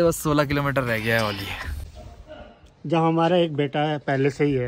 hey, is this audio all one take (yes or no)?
no